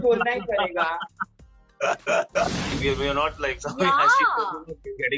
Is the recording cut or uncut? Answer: cut